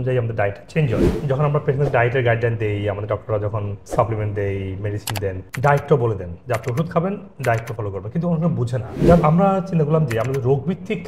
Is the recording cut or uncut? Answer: cut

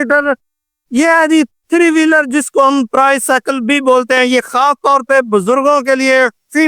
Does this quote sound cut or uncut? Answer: uncut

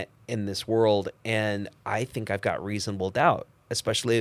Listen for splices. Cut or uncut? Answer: uncut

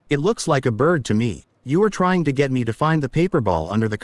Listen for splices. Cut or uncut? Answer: cut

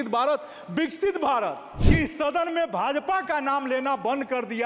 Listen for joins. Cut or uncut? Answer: cut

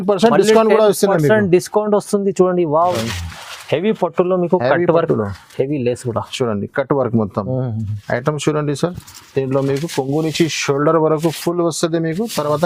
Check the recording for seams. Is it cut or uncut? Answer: cut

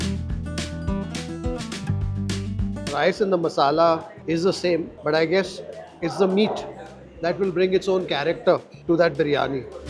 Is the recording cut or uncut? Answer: uncut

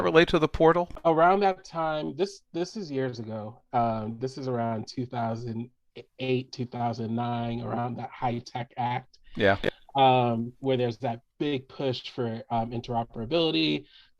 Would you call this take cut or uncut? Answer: cut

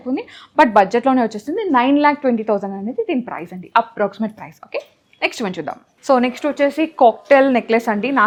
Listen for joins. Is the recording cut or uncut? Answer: uncut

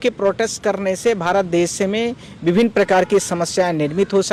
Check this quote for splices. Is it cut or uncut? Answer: uncut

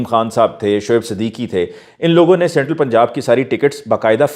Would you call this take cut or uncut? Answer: uncut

